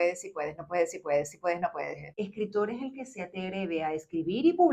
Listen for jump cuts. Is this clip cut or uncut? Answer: cut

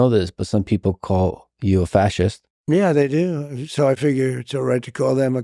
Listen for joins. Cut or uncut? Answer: cut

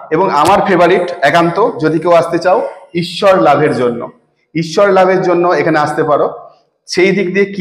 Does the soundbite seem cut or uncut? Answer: uncut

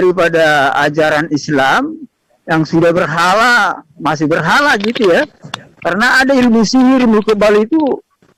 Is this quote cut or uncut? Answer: uncut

